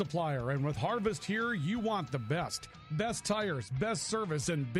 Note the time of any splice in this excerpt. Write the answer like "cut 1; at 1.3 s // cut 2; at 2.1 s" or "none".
none